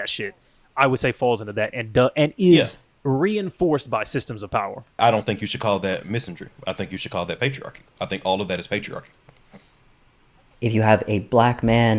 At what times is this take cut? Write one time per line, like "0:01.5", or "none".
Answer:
0:02.9
0:05.0
0:10.5